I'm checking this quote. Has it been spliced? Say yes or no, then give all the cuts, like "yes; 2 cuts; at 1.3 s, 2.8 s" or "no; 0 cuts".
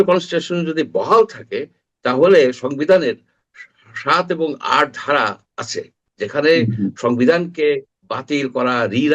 no; 0 cuts